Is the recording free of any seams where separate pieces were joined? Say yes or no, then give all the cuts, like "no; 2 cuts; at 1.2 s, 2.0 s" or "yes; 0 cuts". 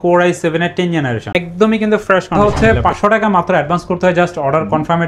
no; 2 cuts; at 1.2 s, 2.4 s